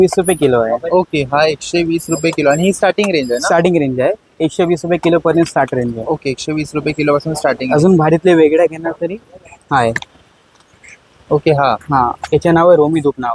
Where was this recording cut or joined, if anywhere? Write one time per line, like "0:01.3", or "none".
none